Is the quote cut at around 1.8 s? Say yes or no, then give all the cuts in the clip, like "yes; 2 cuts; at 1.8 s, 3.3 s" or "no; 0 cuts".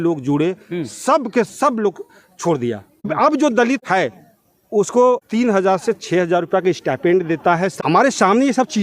no; 4 cuts; at 3.1 s, 3.8 s, 5.2 s, 7.7 s